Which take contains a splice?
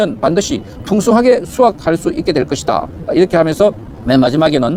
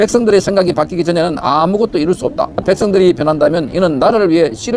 second; 1 cut; at 2.6 s

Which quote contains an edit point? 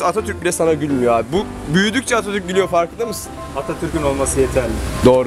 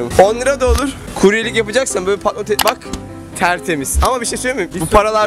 second; 1 cut; at 1.0 s

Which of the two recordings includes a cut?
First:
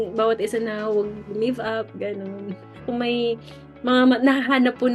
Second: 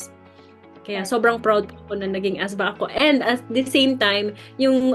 first; 1 cut; at 2.9 s

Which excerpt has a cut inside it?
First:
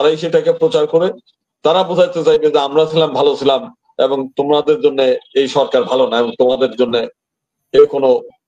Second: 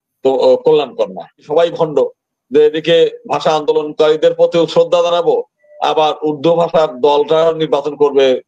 second; 1 cut; at 1.5 s

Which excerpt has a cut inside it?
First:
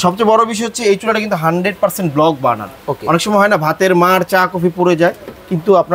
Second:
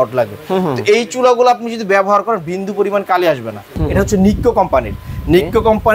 second; 1 cut; at 3.7 s

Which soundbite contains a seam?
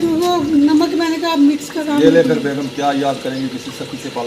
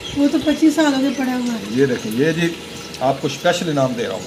first; 1 cut; at 1.8 s

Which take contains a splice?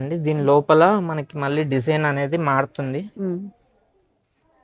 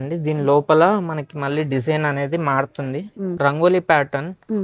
second; 1 cut; at 3.3 s

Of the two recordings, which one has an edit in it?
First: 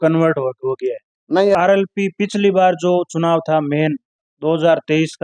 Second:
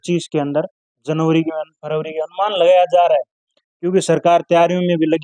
first; 1 cut; at 1.6 s

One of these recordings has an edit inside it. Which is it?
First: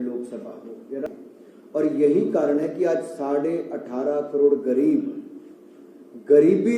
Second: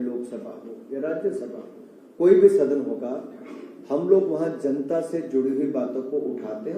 first; 1 cut; at 1.1 s

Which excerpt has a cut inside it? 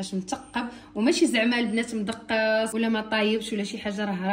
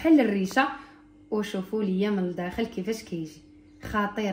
first; 1 cut; at 2.7 s

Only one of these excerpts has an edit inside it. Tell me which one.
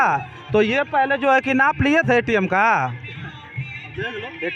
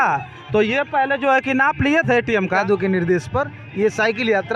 second; 1 cut; at 2.6 s

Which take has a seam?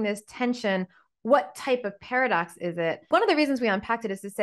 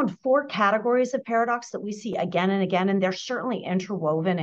first; 1 cut; at 3.1 s

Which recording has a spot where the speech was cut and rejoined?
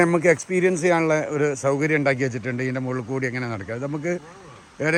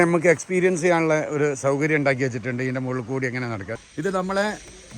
second; 1 cut; at 3.7 s

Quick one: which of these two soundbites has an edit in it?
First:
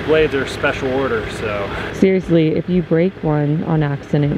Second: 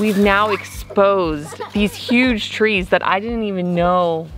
first; 1 cut; at 1.9 s

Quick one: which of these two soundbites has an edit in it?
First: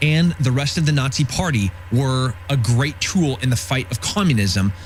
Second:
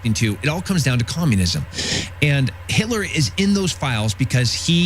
second; 1 cut; at 1.8 s

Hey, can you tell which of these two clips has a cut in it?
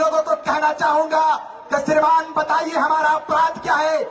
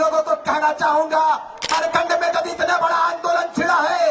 second; 1 cut; at 1.7 s

